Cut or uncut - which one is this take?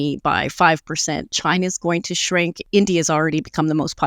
cut